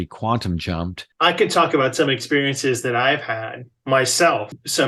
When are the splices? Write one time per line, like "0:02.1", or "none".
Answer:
0:01.1